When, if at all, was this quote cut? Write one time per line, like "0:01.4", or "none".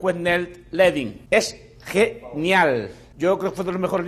0:01.2
0:03.0